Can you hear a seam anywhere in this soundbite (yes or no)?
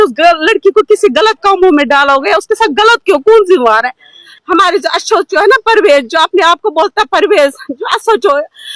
yes